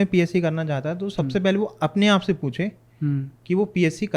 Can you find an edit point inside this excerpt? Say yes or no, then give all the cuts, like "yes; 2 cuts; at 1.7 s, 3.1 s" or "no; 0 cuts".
no; 0 cuts